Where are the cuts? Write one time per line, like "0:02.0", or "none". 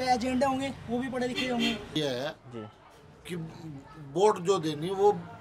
0:01.9